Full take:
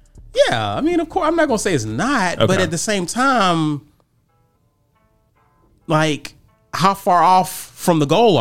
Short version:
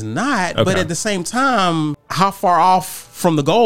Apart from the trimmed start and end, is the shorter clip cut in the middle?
yes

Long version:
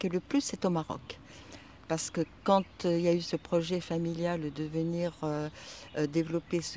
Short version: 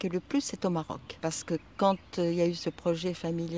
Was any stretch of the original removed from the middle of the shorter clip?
yes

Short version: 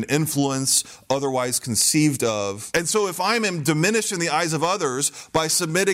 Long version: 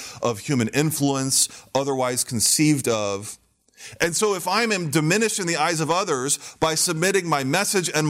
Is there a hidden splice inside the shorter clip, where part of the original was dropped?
yes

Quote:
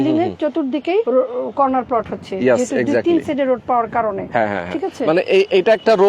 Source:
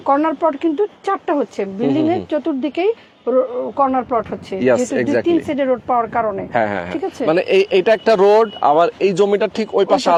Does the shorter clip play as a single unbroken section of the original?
no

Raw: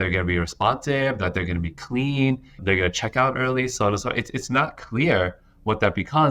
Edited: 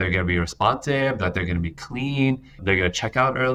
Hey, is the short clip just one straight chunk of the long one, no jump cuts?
yes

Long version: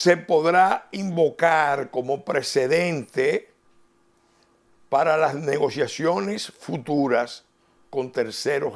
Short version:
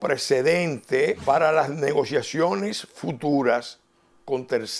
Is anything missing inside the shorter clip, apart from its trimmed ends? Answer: yes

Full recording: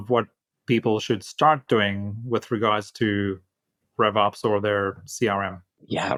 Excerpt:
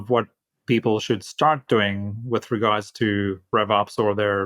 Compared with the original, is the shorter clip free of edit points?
no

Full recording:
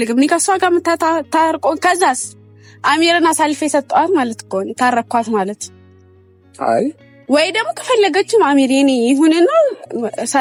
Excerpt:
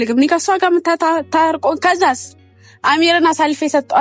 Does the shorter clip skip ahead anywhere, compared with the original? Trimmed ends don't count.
no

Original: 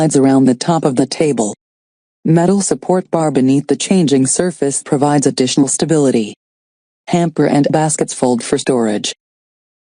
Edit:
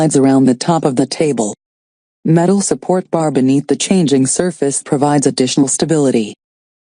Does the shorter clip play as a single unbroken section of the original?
yes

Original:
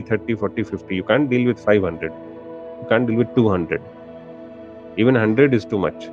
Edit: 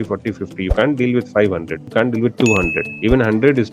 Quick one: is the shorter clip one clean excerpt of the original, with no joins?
no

